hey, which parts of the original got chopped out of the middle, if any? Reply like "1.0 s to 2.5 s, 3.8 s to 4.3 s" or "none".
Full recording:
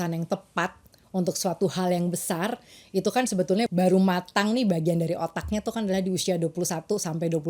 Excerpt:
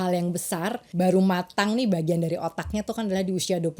2.7 s to 3.7 s